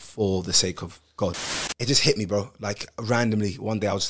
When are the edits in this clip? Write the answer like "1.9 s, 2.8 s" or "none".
1.5 s